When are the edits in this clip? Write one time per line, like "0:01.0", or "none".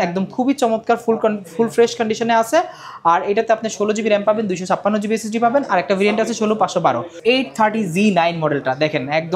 0:07.1